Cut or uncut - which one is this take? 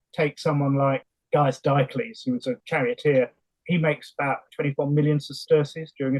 cut